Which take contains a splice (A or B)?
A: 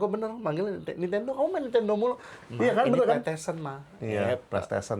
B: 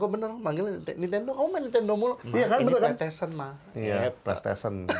B